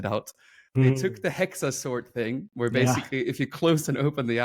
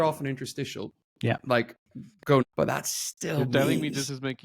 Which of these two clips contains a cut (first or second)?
second